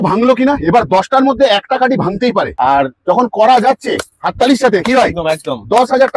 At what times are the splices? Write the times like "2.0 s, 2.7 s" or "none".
2.5 s